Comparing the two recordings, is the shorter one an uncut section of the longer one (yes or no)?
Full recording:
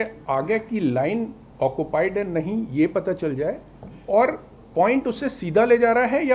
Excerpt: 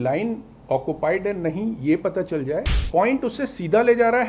no